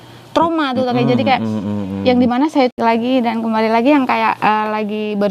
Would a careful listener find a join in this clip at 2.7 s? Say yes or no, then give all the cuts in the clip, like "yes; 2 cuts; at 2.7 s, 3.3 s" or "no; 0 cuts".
yes; 1 cut; at 2.7 s